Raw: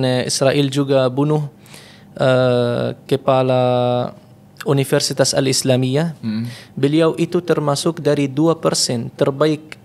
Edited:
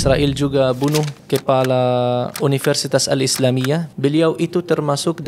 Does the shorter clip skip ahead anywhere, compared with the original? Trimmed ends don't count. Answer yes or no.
yes